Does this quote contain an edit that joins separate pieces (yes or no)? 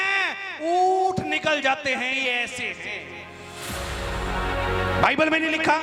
no